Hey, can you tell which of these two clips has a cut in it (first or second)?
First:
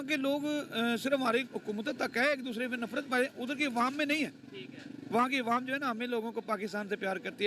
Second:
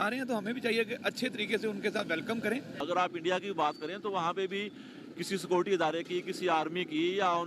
second